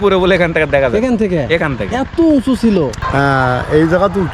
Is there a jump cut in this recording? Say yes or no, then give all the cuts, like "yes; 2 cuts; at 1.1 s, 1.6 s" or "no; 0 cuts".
yes; 1 cut; at 3.0 s